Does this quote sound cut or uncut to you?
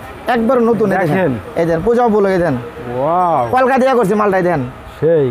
uncut